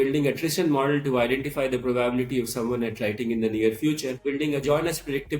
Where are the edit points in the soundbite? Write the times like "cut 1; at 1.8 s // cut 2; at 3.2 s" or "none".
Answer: cut 1; at 4.2 s